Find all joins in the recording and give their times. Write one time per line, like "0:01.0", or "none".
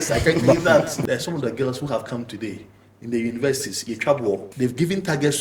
0:00.9
0:04.5